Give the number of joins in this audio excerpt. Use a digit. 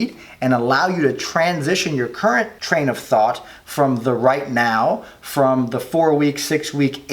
1